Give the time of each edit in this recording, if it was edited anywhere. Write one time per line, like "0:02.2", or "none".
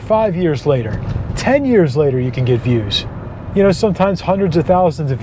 0:03.0

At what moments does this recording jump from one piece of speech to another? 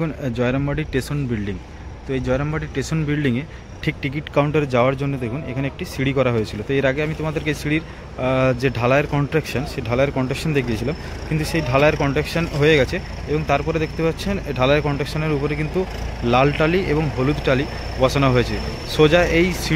none

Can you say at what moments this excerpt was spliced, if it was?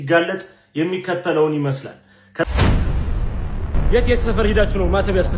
0:02.4

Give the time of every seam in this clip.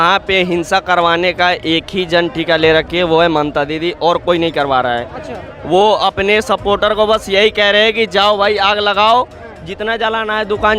none

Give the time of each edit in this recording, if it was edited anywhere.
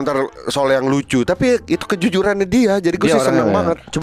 none

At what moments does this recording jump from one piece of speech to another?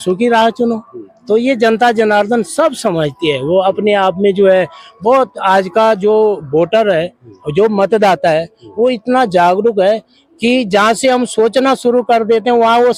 none

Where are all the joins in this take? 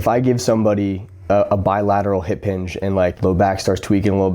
0:01.1
0:03.2

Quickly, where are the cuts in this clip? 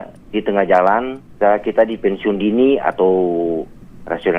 0:01.2

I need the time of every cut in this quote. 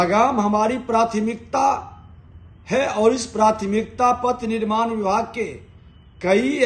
none

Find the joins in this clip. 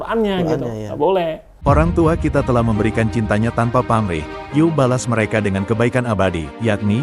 0:01.5

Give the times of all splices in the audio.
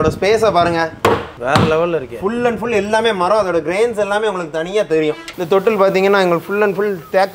0:01.1
0:05.3

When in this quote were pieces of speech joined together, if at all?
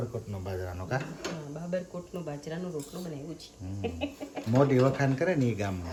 none

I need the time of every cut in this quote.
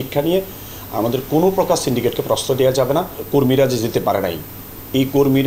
0:03.2

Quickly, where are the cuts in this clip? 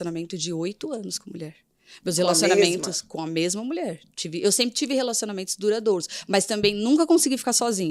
none

